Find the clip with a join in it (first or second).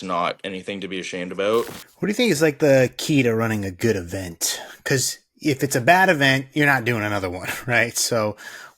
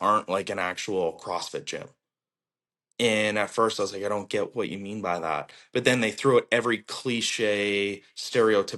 first